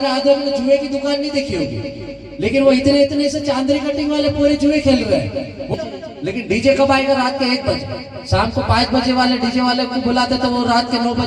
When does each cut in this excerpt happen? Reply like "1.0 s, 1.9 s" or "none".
5.7 s